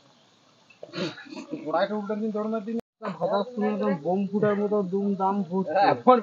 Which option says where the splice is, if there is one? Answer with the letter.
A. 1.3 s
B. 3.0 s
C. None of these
B